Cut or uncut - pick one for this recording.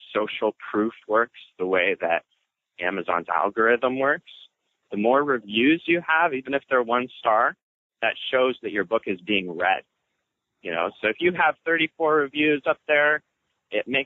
uncut